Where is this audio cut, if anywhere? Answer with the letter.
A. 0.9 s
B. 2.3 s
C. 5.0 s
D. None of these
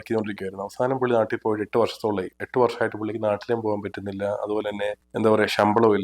C